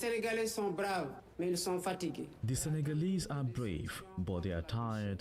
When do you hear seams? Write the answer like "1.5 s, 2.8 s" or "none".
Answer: 1.2 s